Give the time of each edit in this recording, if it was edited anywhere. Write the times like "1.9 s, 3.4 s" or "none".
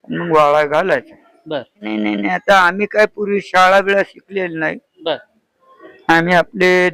1.8 s